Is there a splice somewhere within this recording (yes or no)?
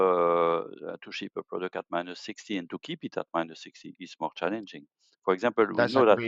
no